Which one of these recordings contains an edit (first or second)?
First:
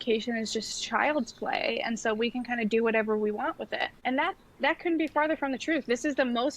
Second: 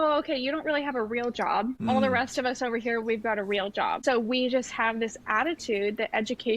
second